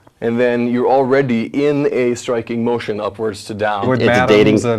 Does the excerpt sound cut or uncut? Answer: cut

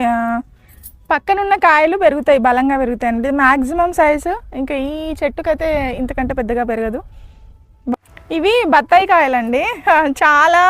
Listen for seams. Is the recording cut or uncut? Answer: cut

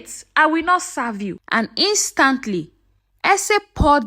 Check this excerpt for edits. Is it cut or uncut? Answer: cut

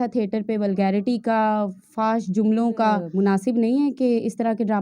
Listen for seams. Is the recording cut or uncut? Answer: cut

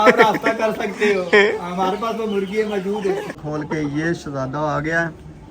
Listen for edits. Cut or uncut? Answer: cut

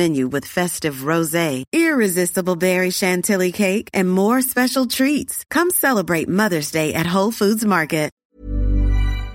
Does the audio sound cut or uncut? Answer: cut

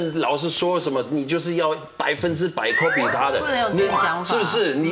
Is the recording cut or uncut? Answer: uncut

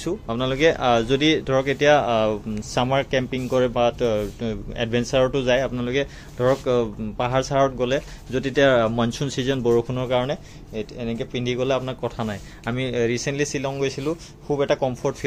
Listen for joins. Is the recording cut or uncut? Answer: uncut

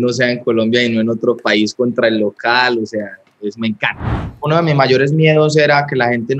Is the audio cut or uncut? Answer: cut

